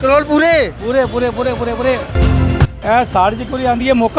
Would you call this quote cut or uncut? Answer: cut